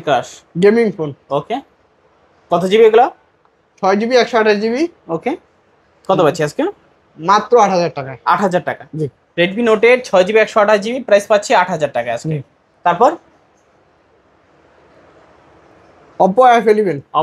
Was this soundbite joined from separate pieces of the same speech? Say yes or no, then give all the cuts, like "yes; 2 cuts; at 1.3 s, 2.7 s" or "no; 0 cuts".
no; 0 cuts